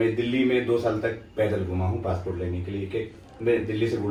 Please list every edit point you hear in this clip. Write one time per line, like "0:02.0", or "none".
none